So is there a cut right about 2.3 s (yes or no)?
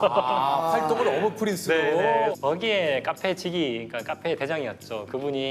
yes